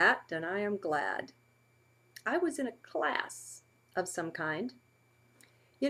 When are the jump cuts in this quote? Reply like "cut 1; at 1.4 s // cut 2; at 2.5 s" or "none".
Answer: none